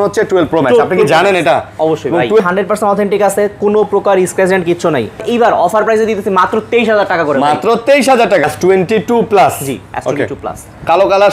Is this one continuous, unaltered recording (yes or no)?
no